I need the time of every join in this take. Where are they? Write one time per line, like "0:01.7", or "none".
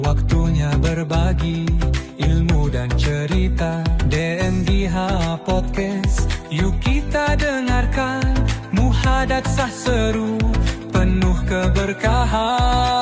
none

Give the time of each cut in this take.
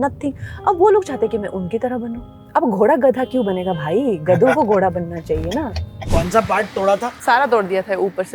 0:02.3
0:06.1
0:07.1

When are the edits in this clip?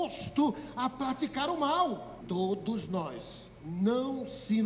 0:02.1

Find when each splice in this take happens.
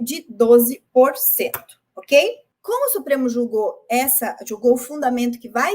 0:02.5

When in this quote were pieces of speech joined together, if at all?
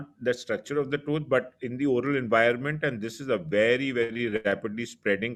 none

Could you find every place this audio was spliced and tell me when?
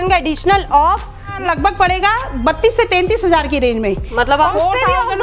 0:01.3
0:04.5

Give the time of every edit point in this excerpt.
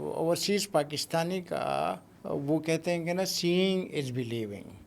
0:02.1

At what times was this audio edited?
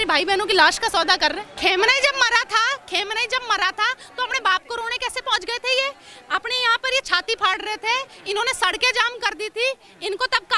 0:01.5

